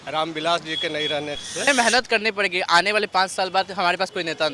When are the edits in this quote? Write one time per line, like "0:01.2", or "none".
0:01.7